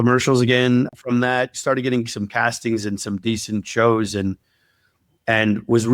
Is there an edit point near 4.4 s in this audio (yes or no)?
no